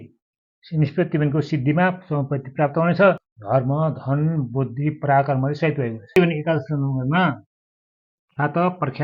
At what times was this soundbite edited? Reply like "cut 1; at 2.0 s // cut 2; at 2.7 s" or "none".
cut 1; at 3.3 s // cut 2; at 6.2 s